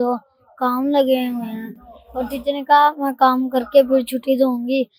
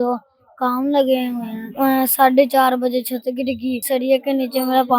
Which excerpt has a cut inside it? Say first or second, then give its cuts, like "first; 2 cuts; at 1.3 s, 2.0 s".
second; 2 cuts; at 1.7 s, 3.8 s